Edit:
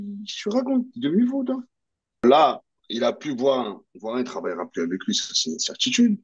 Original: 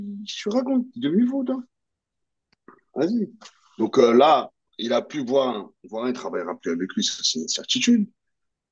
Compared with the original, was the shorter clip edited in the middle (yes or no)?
yes